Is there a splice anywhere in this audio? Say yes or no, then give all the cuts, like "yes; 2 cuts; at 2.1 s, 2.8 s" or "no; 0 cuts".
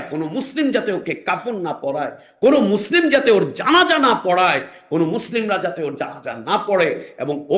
no; 0 cuts